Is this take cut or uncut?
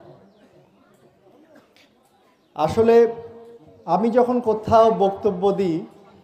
uncut